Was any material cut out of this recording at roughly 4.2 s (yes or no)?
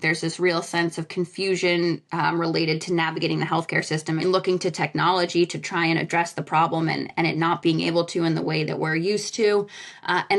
yes